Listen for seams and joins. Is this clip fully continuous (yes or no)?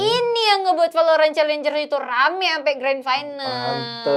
yes